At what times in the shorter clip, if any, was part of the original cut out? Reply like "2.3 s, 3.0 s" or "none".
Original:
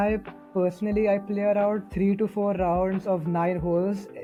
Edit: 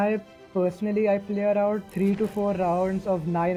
none

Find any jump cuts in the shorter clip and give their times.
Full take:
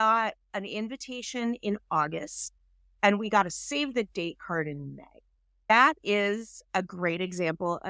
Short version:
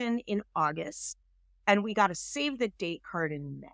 none

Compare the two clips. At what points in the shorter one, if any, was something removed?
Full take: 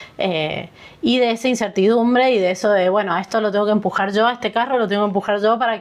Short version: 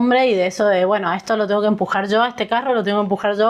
none

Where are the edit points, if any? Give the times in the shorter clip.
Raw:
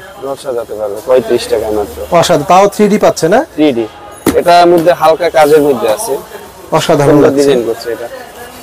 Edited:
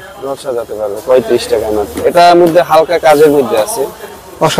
1.9 s

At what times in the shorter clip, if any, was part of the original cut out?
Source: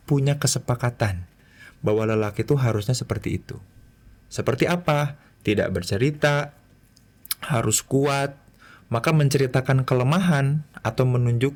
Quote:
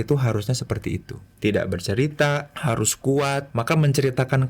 1.2 s, 2.5 s, 3.5 s

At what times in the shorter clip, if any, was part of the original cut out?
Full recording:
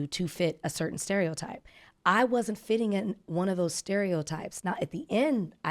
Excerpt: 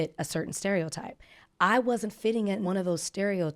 2.7 s

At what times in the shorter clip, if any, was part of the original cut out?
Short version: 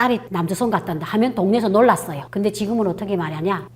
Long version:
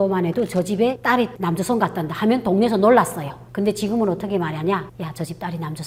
2.2 s

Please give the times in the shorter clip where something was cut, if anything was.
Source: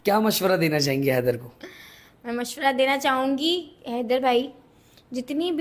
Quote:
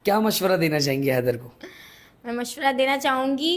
none

